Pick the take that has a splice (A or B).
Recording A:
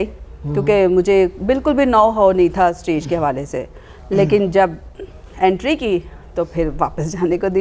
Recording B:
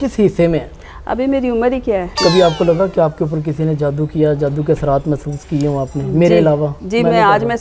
B